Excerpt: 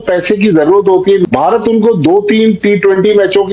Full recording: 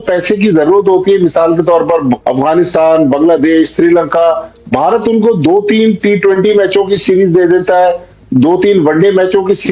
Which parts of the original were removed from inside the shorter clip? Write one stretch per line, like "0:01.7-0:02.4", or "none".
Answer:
0:01.3-0:04.7